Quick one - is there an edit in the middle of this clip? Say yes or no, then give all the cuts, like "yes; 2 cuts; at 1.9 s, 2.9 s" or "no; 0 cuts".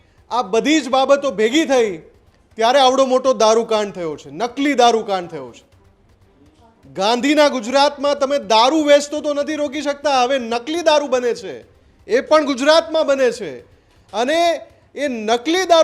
no; 0 cuts